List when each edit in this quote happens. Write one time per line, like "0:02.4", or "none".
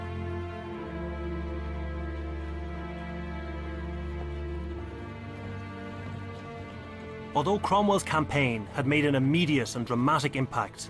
0:03.8